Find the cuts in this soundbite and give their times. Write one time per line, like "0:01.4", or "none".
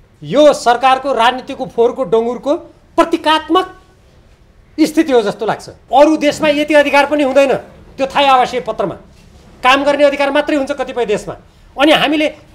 0:05.7